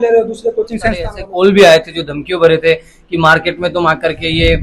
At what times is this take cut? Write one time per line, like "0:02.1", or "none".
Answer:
0:01.2